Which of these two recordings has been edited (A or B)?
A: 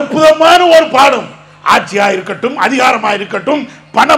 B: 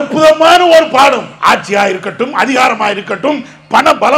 B